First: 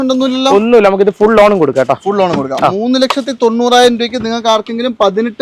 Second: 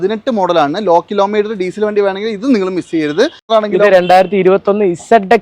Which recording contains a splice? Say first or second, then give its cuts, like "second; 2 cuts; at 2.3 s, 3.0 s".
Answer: second; 1 cut; at 3.4 s